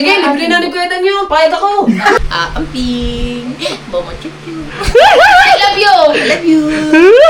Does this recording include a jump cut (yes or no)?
yes